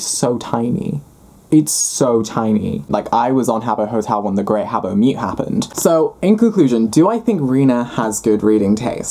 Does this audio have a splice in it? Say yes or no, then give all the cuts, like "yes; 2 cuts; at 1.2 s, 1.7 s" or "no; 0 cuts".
yes; 2 cuts; at 2.9 s, 5.7 s